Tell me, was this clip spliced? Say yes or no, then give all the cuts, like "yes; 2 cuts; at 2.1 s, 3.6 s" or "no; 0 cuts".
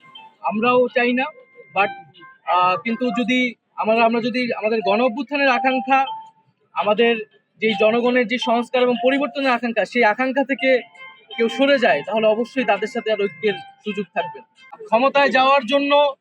yes; 1 cut; at 14.6 s